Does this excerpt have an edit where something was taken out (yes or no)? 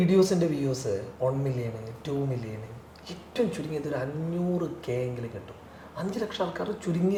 no